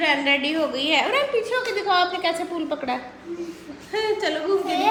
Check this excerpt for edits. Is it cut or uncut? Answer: uncut